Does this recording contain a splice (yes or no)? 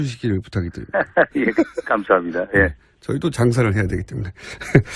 yes